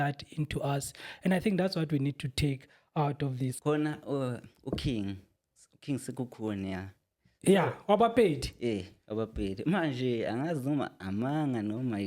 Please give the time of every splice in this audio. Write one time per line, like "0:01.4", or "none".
0:03.6